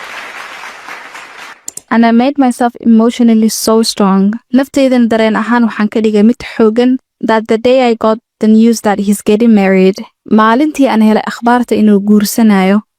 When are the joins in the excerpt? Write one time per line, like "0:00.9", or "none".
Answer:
0:01.6